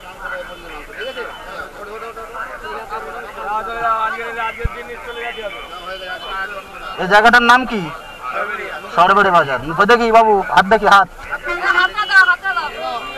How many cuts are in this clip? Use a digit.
1